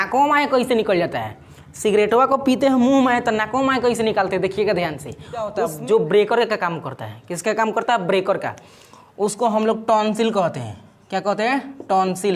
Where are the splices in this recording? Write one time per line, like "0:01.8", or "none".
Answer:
0:05.6